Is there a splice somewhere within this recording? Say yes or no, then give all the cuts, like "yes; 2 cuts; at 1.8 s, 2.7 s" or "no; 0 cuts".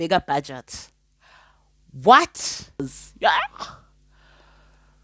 yes; 1 cut; at 2.8 s